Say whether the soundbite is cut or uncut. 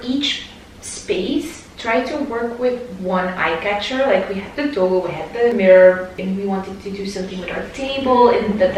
uncut